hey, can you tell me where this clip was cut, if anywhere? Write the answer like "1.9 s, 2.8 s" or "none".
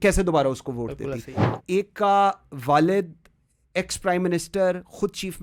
1.4 s